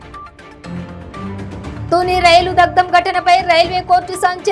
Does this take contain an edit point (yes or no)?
no